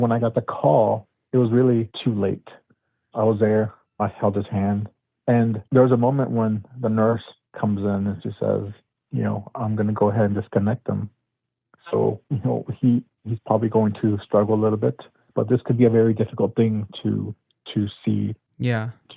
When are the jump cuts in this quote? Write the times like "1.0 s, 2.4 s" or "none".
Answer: none